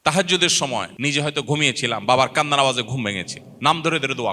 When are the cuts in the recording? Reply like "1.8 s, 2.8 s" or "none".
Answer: 0.9 s